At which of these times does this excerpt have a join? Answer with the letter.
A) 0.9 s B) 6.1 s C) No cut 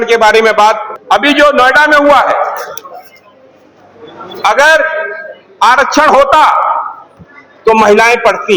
A